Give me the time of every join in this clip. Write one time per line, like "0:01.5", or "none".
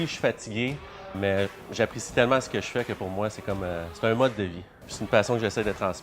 0:01.2
0:04.9